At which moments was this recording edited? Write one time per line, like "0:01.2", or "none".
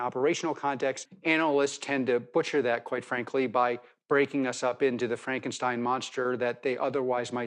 0:01.1